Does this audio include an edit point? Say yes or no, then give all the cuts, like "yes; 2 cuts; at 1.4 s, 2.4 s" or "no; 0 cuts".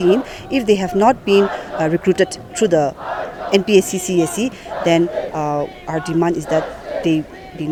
no; 0 cuts